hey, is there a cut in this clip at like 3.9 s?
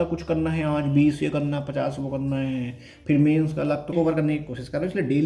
yes; 1 cut; at 3.9 s

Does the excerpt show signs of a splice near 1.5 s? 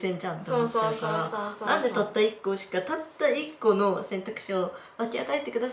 no; 0 cuts

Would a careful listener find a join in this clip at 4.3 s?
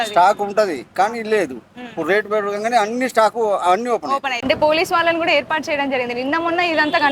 yes; 1 cut; at 4.3 s

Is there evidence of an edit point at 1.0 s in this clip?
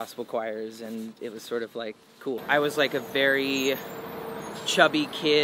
no; 1 cut; at 2.4 s

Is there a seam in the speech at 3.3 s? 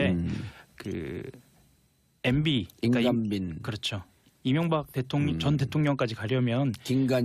no; 1 cut; at 5.1 s

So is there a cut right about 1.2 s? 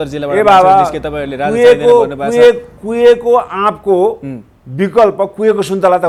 no; 0 cuts

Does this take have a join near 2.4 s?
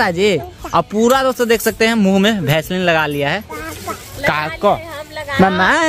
no; 0 cuts

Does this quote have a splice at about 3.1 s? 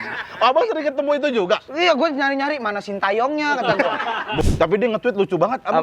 no; 1 cut; at 4.4 s

